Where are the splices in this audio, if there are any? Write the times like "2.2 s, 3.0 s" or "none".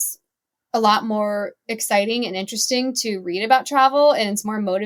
none